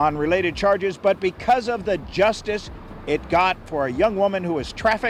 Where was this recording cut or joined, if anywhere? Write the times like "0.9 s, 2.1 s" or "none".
none